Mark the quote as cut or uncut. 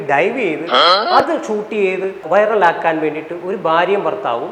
uncut